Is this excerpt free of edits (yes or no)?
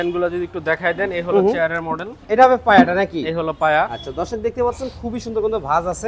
yes